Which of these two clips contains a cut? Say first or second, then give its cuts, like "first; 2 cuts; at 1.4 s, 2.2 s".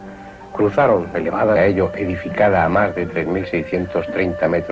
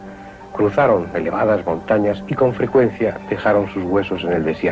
second; 1 cut; at 1.6 s